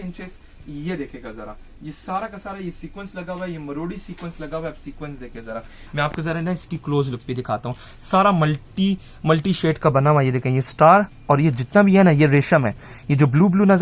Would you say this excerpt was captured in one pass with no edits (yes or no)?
yes